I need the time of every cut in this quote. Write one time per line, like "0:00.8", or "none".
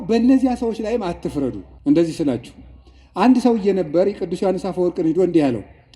0:01.7